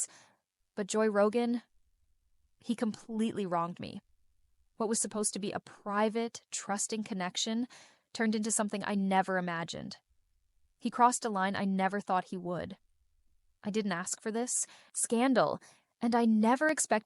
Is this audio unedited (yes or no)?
yes